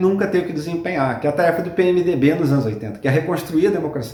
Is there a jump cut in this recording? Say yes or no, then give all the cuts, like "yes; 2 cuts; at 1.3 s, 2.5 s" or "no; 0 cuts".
no; 0 cuts